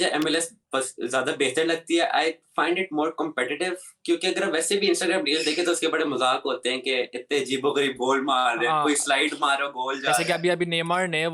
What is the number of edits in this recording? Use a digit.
0